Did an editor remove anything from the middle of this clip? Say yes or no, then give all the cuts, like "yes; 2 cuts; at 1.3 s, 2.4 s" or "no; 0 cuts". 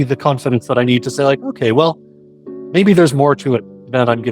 no; 0 cuts